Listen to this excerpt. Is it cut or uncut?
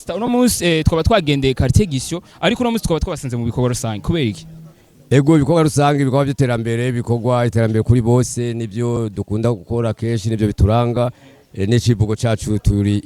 cut